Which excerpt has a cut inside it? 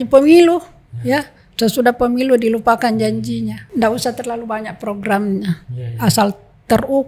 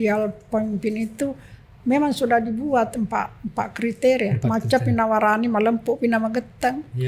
first; 1 cut; at 3.6 s

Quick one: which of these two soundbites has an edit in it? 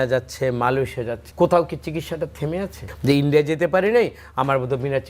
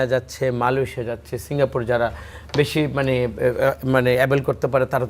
first; 2 cuts; at 1.2 s, 2.9 s

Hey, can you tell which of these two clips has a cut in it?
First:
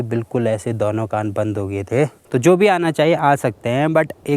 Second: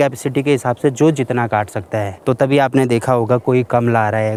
first; 1 cut; at 2.2 s

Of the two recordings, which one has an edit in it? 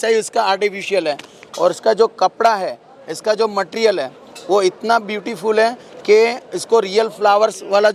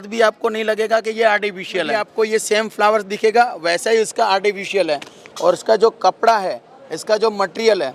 second; 1 cut; at 2.0 s

